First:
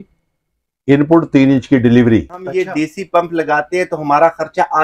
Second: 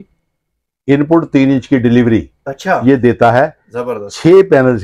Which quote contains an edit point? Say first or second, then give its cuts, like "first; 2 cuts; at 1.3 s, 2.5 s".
first; 1 cut; at 2.5 s